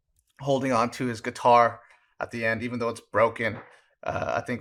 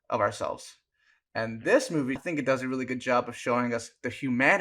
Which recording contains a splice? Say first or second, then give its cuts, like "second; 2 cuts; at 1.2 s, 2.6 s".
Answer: second; 1 cut; at 2.2 s